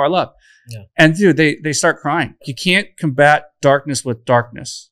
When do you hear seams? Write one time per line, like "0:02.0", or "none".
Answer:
0:02.5